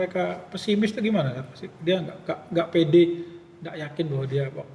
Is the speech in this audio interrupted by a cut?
no; 0 cuts

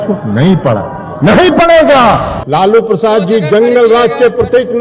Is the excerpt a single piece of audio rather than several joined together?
no; 1 cut; at 2.3 s

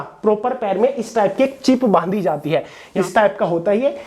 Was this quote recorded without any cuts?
no; 1 cut; at 2.8 s

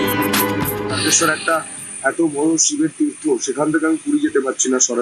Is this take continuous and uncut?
no; 1 cut; at 1.0 s

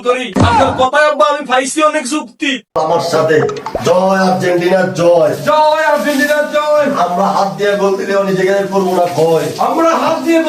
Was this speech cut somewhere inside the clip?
yes; 1 cut; at 2.8 s

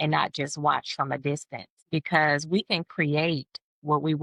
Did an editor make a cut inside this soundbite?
no; 0 cuts

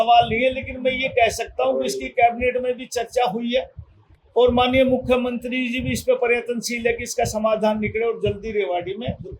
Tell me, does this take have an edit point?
no; 0 cuts

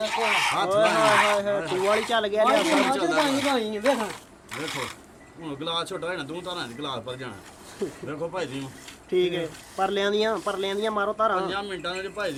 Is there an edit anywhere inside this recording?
no; 0 cuts

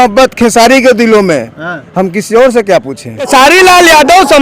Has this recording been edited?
yes; 1 cut; at 3.3 s

